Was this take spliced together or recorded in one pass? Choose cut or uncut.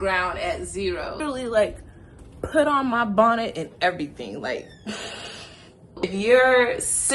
cut